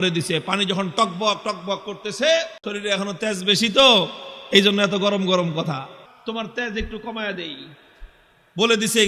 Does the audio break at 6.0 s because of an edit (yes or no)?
yes